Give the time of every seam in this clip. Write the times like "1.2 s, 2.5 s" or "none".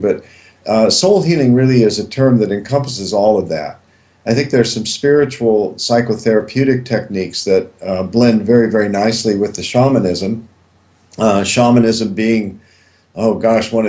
1.3 s